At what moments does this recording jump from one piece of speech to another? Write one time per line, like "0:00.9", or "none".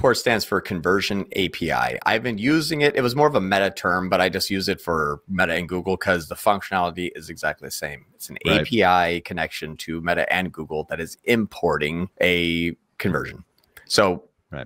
0:12.1